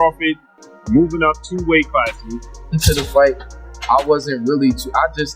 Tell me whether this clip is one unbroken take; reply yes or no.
no